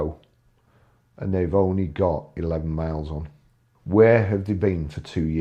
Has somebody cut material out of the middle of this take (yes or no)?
no